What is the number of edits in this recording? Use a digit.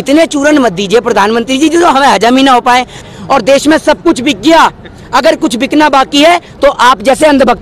1